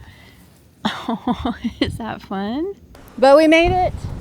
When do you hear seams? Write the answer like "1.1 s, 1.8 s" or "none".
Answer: 2.9 s

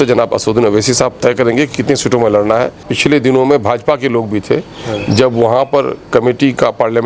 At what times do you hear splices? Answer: 2.9 s

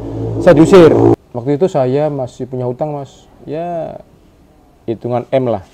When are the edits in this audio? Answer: 1.2 s

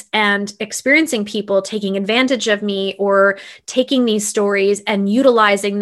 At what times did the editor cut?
none

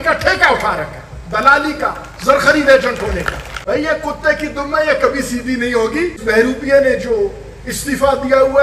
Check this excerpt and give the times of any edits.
3.4 s, 6.2 s

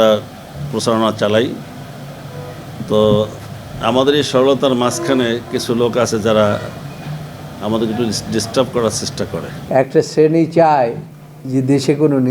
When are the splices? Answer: 9.5 s

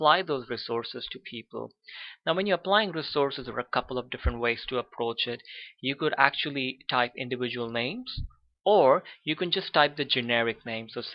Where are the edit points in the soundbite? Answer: 7.4 s

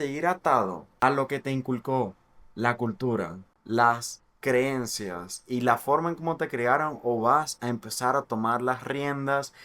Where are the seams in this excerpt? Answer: 0.9 s

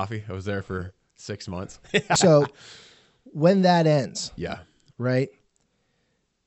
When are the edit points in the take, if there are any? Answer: 2.1 s

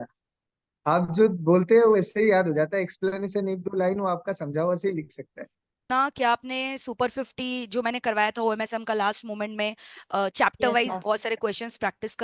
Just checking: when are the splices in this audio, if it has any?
5.8 s

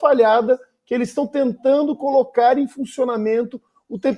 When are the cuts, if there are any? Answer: none

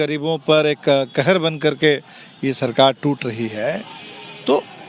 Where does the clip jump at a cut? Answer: none

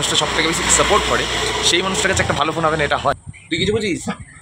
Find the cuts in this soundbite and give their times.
3.3 s

